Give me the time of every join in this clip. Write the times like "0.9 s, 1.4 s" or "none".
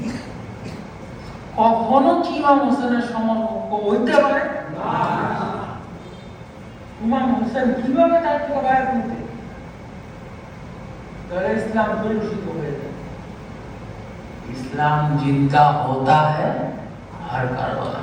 none

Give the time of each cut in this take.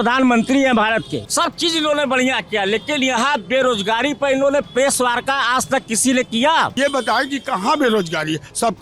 1.2 s, 6.8 s

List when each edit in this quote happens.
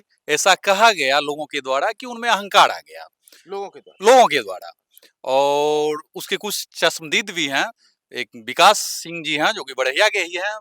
none

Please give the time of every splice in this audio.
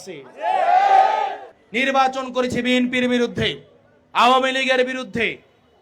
1.5 s

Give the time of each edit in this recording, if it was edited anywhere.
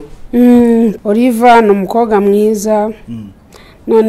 1.0 s

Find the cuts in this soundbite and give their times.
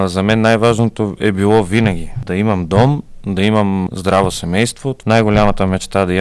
2.2 s, 3.9 s, 4.9 s

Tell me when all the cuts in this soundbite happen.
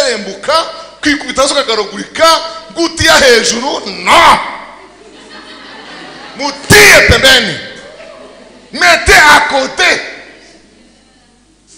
none

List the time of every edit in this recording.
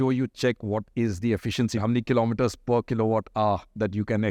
1.8 s

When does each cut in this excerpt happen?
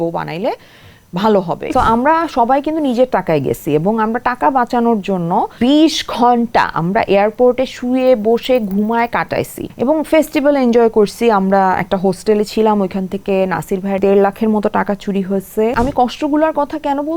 1.7 s, 5.5 s, 9.6 s, 14.0 s, 15.7 s

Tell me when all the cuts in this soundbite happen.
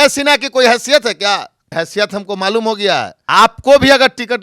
1.6 s, 3.2 s

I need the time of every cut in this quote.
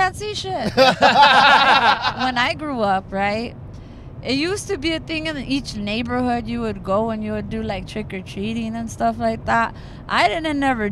2.1 s

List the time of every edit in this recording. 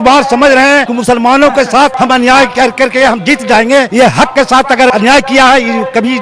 0.9 s, 1.9 s, 3.9 s, 4.9 s

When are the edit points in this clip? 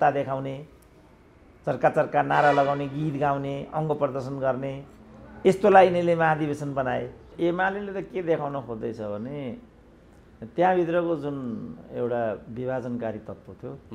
7.3 s

